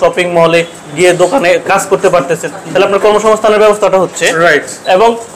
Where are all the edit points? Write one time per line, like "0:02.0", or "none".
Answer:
none